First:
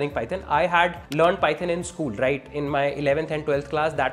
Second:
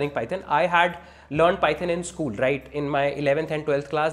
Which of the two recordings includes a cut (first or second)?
first